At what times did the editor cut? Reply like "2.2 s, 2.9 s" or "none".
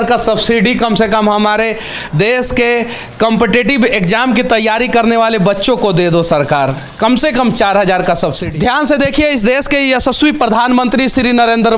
8.4 s